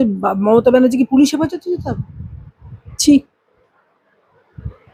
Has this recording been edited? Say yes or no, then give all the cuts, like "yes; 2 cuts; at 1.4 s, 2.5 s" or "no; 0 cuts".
no; 0 cuts